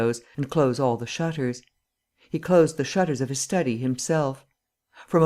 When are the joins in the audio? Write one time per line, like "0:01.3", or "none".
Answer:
none